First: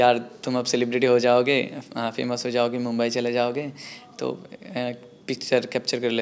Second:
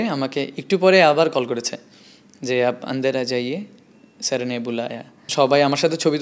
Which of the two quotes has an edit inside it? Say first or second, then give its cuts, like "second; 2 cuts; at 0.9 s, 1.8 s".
second; 1 cut; at 5.3 s